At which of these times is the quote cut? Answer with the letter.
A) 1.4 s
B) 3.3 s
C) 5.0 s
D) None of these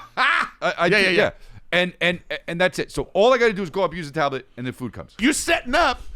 C